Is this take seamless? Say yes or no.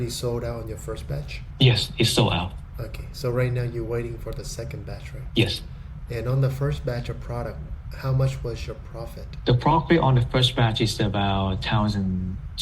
yes